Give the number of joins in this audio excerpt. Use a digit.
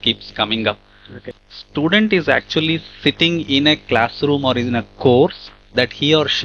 1